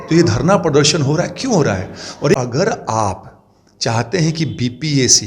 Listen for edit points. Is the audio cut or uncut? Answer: cut